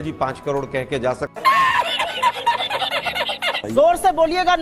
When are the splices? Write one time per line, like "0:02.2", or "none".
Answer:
0:01.3
0:03.4